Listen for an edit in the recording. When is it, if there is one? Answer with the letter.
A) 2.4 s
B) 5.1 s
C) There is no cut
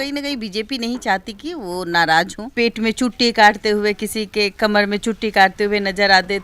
A